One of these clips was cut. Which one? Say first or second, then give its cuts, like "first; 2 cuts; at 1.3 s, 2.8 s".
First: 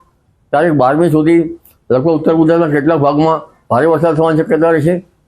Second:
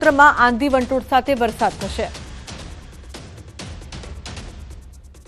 second; 1 cut; at 1.0 s